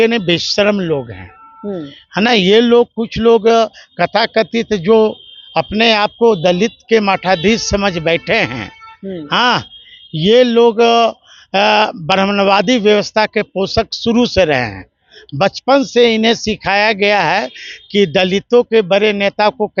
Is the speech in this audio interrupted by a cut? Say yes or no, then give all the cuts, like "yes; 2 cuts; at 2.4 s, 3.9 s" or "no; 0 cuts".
no; 0 cuts